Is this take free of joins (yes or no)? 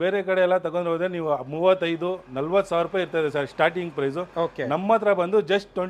yes